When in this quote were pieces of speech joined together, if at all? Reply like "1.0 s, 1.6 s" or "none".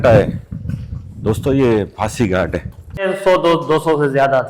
3.1 s